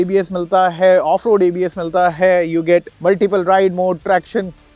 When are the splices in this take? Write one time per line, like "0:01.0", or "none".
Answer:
none